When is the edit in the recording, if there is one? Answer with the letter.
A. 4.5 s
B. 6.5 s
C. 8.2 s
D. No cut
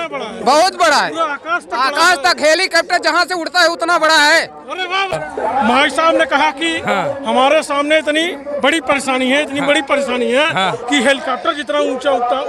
D